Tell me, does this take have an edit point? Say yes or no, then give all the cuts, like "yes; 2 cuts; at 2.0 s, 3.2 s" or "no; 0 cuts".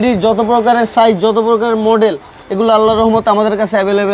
no; 0 cuts